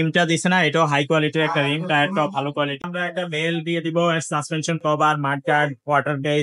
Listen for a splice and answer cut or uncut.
cut